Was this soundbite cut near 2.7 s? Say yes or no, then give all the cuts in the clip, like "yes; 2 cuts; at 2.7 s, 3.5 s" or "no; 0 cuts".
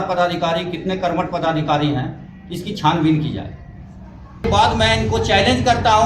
no; 1 cut; at 4.4 s